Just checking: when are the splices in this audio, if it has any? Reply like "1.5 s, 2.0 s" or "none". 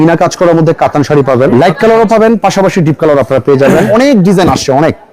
1.5 s, 3.9 s